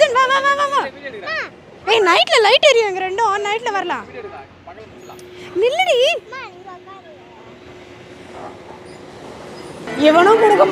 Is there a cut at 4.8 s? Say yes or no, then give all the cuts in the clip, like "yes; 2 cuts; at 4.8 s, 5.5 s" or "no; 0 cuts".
no; 1 cut; at 9.8 s